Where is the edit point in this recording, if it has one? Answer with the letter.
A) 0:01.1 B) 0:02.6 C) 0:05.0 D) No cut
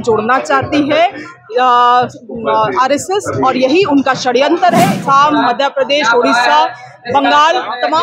C